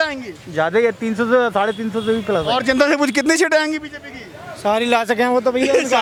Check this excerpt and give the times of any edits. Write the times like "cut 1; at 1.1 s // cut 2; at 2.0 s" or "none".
none

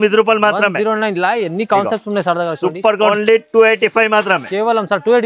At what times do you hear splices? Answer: cut 1; at 3.1 s

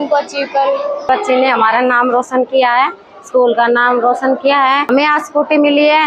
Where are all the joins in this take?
cut 1; at 1.0 s // cut 2; at 4.9 s

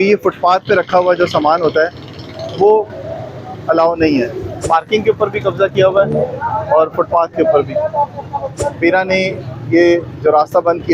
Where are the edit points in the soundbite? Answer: cut 1; at 4.5 s // cut 2; at 8.5 s

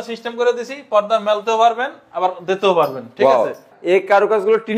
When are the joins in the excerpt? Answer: cut 1; at 3.7 s

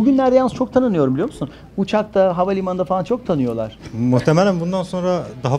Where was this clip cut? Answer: cut 1; at 3.7 s

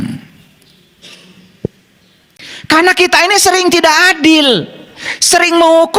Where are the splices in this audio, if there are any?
none

